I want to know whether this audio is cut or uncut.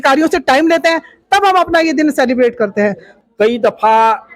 cut